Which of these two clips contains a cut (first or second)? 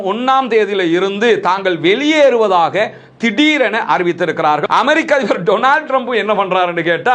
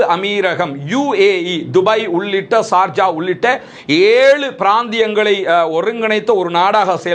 first